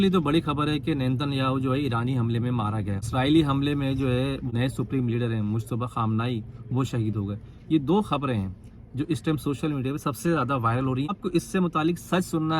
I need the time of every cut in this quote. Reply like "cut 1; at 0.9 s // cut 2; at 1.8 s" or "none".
cut 1; at 3.0 s // cut 2; at 11.1 s